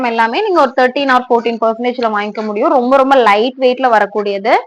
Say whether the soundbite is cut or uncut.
uncut